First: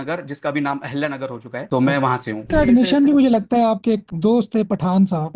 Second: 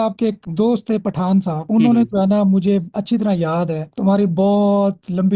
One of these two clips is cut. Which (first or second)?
first